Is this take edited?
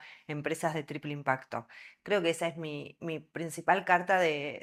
no; 0 cuts

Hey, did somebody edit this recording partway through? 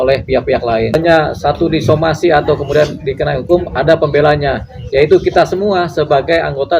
yes; 1 cut; at 0.9 s

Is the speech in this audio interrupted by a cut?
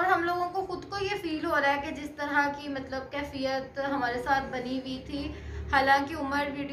no; 0 cuts

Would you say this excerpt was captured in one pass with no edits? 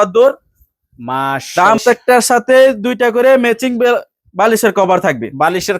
no; 1 cut; at 1.8 s

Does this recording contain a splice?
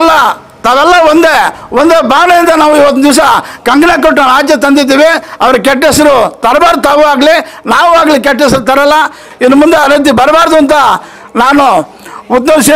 no; 0 cuts

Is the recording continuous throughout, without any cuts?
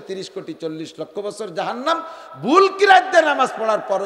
yes; 0 cuts

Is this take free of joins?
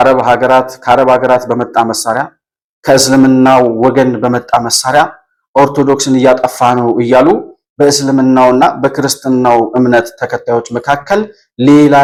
yes; 0 cuts

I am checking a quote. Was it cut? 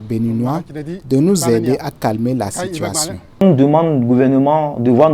yes; 1 cut; at 3.2 s

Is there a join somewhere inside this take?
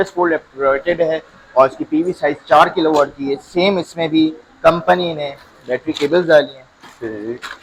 no; 0 cuts

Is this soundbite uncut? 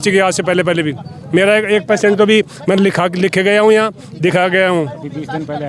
yes; 0 cuts

